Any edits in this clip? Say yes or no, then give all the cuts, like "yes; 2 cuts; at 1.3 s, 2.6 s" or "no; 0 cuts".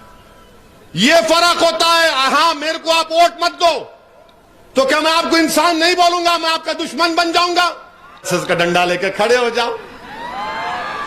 yes; 1 cut; at 8.3 s